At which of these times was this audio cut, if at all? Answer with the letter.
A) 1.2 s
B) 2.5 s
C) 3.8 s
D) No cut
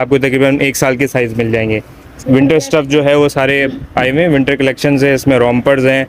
D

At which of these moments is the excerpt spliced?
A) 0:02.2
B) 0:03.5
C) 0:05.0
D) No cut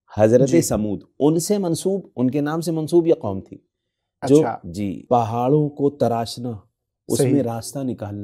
C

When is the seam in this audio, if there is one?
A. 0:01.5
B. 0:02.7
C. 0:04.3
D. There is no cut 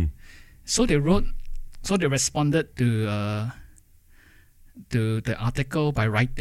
D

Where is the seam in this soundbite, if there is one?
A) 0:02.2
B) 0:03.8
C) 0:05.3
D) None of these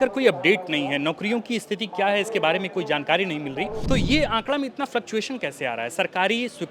B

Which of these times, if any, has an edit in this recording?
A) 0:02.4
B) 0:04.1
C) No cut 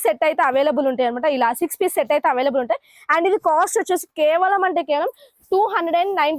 C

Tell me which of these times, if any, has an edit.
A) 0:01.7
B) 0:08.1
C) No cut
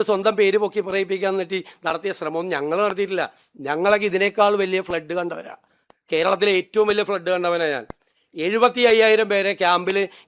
C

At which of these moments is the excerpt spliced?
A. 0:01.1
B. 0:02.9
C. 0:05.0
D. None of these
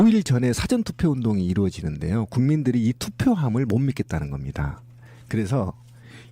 C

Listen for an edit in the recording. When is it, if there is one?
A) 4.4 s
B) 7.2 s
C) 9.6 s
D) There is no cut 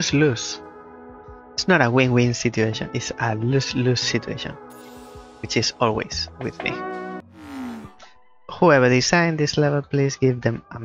B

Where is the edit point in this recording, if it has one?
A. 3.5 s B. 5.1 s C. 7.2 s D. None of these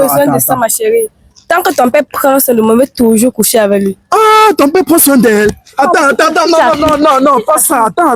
D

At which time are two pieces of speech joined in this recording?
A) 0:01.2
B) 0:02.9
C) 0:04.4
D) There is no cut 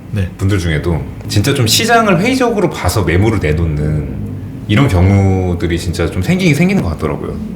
A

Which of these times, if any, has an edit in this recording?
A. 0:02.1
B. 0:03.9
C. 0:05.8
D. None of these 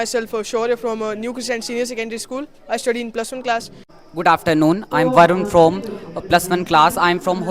B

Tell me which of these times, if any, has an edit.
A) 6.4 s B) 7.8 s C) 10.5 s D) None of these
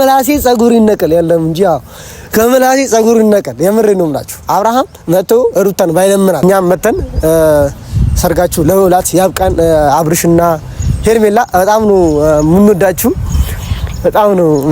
A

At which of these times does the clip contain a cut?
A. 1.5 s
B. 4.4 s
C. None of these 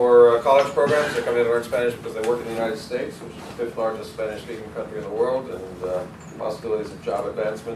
C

